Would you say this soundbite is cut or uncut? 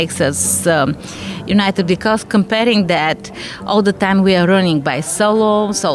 uncut